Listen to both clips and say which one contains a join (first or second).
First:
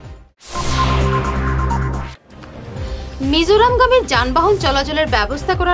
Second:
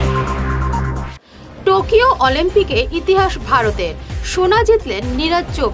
second